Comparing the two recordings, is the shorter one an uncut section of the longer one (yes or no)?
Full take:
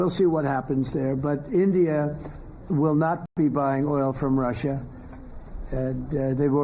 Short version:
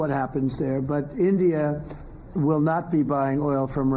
no